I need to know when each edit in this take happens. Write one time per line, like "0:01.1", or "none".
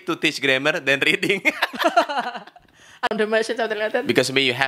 0:03.1